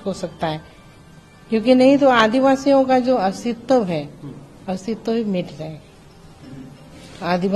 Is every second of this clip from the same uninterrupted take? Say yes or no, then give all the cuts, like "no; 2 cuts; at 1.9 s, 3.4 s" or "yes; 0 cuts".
yes; 0 cuts